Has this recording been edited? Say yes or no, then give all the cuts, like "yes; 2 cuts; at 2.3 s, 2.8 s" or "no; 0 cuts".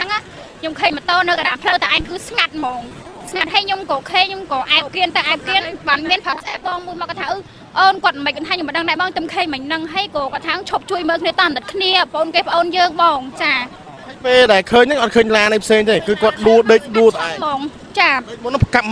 no; 0 cuts